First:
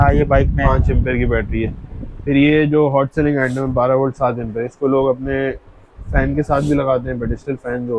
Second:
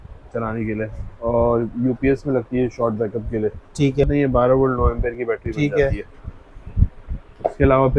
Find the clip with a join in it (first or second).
second